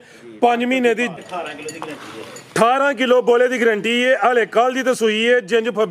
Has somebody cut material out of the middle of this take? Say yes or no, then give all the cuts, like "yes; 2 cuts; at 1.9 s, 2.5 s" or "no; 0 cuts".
yes; 1 cut; at 1.1 s